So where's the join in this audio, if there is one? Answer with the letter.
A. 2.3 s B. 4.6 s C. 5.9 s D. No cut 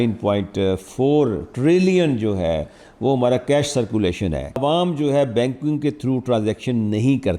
B